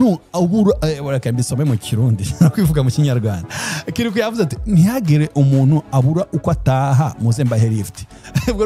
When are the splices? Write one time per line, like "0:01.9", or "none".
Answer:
none